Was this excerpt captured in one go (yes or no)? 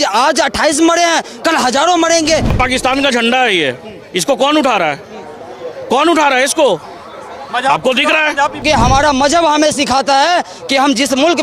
no